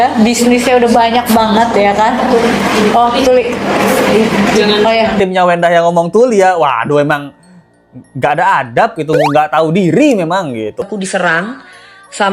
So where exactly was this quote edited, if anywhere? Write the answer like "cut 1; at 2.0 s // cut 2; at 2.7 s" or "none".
cut 1; at 5.2 s // cut 2; at 10.8 s